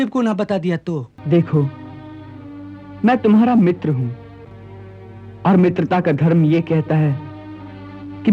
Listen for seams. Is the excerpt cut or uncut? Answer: cut